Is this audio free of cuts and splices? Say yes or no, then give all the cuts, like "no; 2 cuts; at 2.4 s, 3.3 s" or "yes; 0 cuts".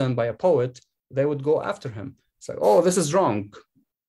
yes; 0 cuts